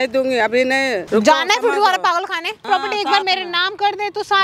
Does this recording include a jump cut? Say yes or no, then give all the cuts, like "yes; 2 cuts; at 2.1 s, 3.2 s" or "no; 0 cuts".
yes; 2 cuts; at 1.0 s, 2.6 s